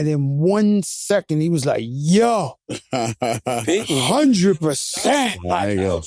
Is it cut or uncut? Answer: uncut